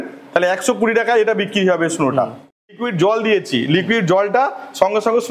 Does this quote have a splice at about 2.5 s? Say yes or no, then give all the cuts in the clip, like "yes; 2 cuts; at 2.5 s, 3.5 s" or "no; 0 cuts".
yes; 1 cut; at 2.5 s